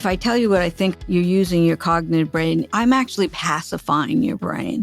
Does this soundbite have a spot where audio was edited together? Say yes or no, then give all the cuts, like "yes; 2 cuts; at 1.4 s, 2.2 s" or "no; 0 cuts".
yes; 1 cut; at 1.0 s